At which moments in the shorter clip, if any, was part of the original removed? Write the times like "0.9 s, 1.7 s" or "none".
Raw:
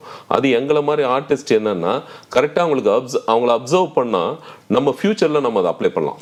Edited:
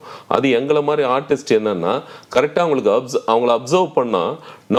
none